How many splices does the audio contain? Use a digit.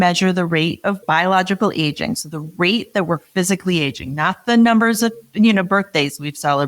1